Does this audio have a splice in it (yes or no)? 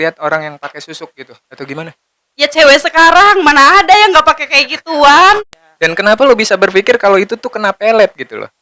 yes